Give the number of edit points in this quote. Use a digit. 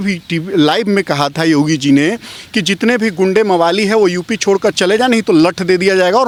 0